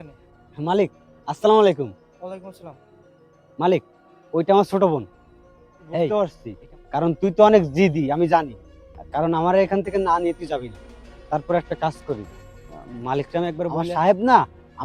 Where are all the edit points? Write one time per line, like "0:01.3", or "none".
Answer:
0:06.1
0:13.7